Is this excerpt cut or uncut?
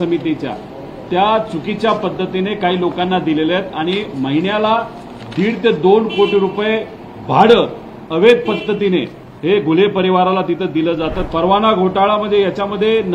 cut